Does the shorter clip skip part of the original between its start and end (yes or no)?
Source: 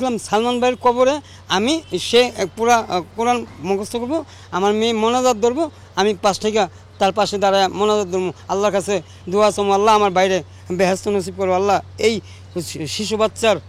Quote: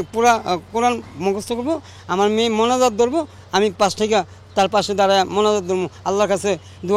no